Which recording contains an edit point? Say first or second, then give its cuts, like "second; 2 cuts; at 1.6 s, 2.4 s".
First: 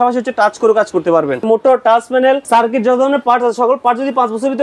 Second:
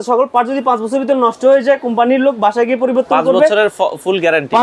first; 2 cuts; at 1.5 s, 2.4 s